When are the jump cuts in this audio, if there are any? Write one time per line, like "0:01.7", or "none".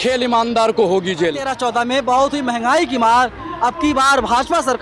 0:01.5

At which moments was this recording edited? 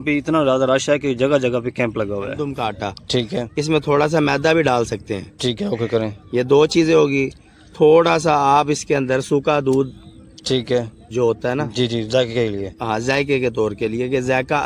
0:02.5

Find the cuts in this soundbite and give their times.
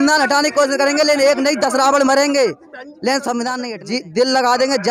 0:03.8

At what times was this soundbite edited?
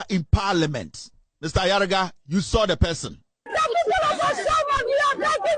0:03.4

